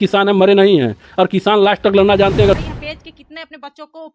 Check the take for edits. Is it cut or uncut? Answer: cut